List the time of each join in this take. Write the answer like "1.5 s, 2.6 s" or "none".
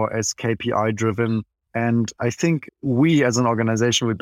1.6 s, 2.7 s